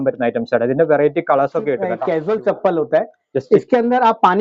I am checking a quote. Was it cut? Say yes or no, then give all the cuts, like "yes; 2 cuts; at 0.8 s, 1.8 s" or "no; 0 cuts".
yes; 1 cut; at 2.0 s